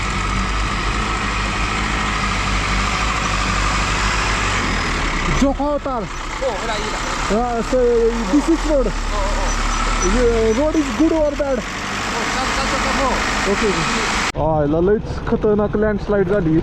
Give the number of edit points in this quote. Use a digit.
1